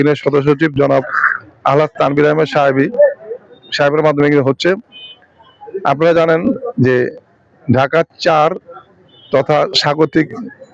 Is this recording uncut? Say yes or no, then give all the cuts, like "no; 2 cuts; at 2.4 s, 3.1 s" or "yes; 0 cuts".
yes; 0 cuts